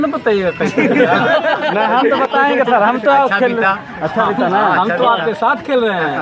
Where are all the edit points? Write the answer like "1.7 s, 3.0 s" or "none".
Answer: none